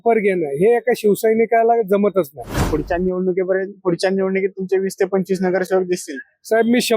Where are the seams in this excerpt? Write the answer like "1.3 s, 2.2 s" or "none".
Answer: 2.6 s

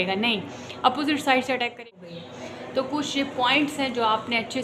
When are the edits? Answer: 1.8 s

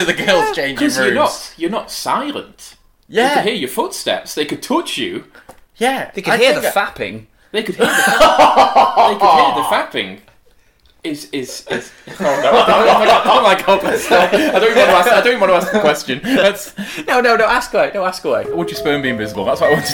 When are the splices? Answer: 18.6 s

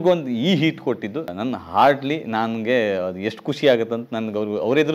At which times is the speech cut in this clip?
1.3 s

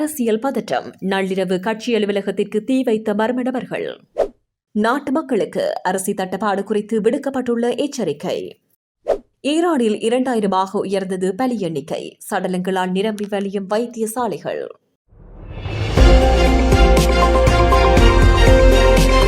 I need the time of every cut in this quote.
14.7 s

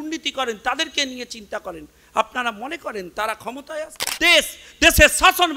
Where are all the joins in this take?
4.2 s

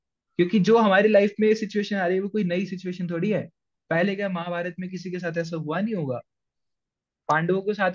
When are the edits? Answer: none

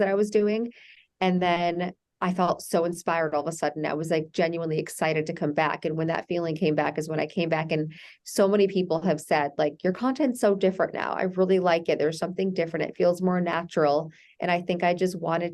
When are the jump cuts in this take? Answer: none

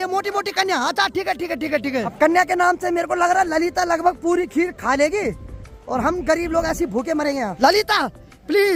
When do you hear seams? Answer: none

